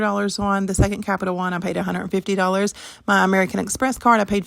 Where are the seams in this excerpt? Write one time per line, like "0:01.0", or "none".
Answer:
0:01.0